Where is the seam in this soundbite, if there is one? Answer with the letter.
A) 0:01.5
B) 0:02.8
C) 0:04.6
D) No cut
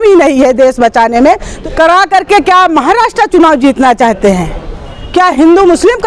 A